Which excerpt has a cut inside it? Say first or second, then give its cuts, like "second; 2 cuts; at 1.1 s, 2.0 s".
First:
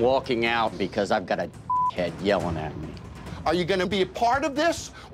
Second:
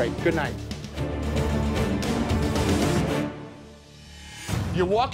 first; 1 cut; at 3.3 s